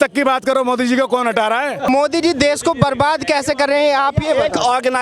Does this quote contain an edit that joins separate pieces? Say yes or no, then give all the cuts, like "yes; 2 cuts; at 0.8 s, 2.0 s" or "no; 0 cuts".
yes; 1 cut; at 1.9 s